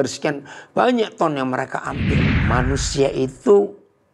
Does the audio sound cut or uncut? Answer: cut